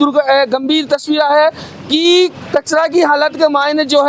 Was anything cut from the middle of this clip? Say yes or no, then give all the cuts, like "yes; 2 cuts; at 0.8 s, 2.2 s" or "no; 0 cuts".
no; 0 cuts